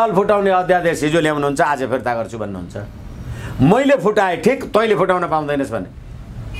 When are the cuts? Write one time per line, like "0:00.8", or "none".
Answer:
none

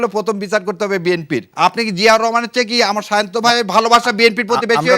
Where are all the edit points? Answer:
0:01.5

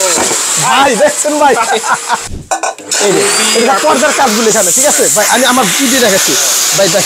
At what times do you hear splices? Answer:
0:02.2

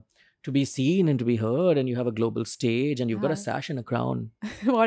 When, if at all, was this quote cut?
none

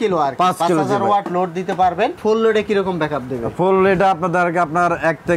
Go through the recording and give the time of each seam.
0:02.2

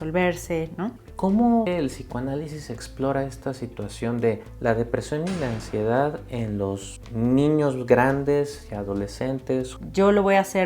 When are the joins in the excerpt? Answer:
0:01.0
0:01.7
0:09.8

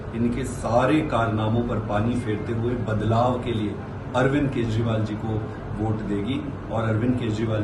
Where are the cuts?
none

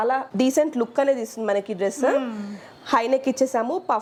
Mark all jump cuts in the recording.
none

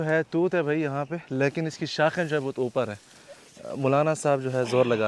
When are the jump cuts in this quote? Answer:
none

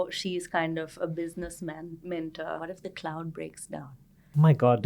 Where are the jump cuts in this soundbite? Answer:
0:02.6

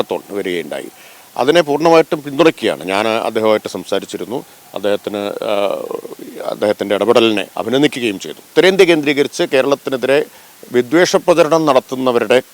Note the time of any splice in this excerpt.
0:08.5

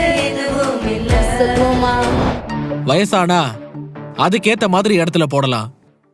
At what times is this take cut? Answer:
0:02.3

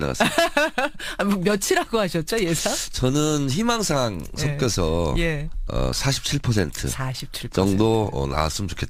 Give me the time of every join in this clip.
none

